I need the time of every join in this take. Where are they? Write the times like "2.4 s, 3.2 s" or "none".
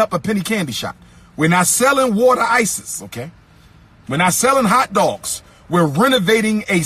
3.9 s